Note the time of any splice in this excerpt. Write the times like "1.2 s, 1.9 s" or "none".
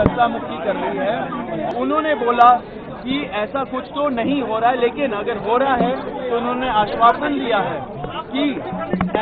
1.7 s